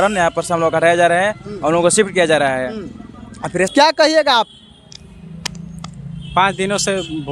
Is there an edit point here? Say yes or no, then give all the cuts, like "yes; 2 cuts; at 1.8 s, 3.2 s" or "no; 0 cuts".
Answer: yes; 1 cut; at 3.7 s